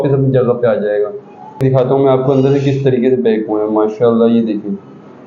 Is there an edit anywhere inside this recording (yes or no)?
yes